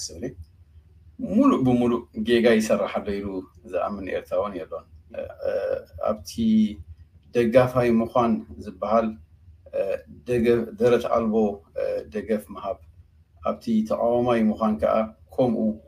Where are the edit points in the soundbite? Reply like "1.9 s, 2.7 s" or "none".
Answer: 5.2 s